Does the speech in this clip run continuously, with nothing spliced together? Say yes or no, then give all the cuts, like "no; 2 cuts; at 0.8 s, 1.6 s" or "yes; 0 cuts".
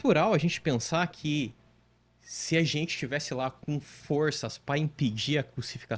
yes; 0 cuts